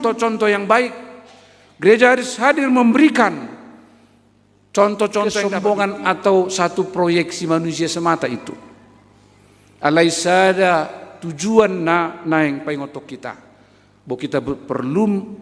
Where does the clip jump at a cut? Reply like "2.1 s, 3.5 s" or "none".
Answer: 5.4 s